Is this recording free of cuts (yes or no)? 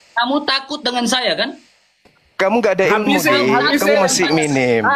yes